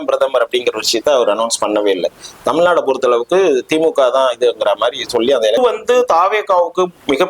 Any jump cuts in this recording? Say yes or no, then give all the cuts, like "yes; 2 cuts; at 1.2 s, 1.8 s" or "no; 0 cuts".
yes; 1 cut; at 5.6 s